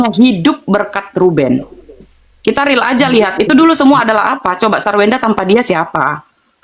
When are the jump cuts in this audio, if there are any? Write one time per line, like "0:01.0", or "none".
none